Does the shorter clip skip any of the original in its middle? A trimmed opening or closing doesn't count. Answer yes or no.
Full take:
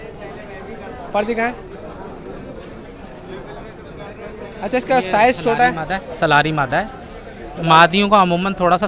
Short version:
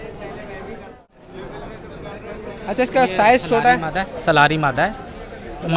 yes